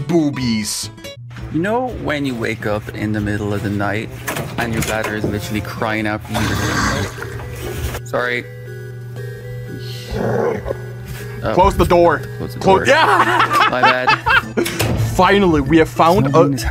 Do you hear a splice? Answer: no; 0 cuts

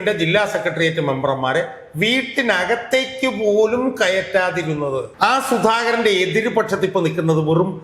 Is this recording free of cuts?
no; 1 cut; at 5.1 s

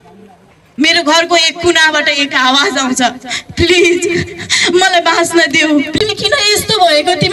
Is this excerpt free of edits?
no; 1 cut; at 6.0 s

